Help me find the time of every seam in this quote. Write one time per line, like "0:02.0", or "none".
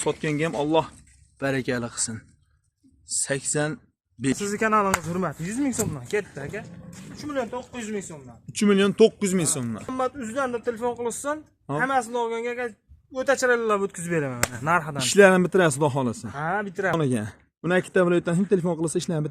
0:04.3
0:09.9
0:16.9